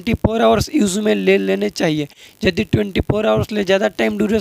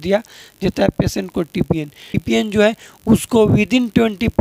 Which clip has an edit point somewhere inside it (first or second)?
second